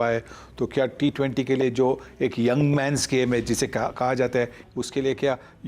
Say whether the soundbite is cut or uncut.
cut